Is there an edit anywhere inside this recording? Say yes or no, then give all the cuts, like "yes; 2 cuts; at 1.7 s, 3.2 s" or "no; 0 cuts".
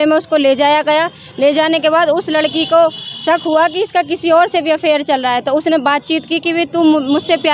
no; 0 cuts